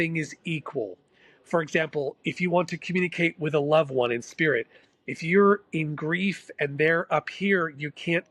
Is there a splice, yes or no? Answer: no